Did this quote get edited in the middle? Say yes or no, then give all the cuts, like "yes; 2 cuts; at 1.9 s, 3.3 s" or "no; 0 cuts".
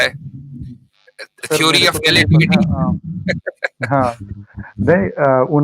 no; 0 cuts